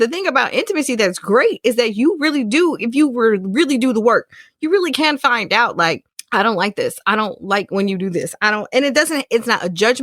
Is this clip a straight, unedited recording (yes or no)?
no